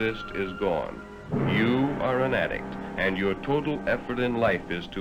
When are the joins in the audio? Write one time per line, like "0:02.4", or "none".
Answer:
0:01.1